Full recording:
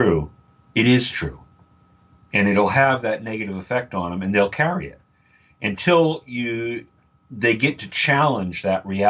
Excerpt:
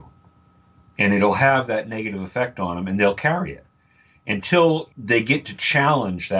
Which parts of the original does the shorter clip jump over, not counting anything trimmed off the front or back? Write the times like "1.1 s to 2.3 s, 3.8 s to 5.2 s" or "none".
6.3 s to 7.2 s